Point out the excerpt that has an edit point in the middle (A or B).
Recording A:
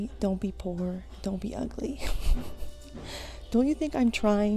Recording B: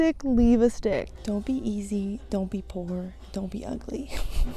B